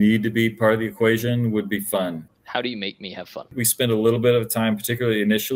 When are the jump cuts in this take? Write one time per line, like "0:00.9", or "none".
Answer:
0:02.3
0:03.6